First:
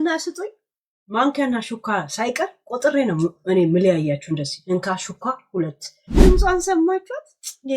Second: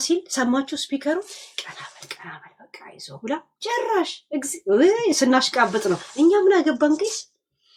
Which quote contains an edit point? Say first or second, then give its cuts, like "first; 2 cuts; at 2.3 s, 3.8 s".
first; 1 cut; at 6.2 s